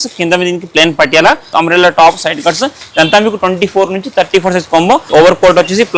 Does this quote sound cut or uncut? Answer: cut